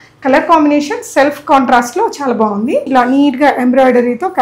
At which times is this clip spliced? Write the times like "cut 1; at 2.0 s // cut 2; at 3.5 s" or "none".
cut 1; at 2.9 s